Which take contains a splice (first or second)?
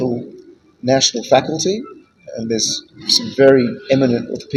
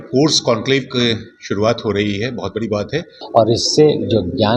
second